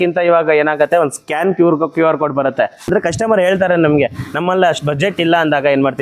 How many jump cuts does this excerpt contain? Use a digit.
1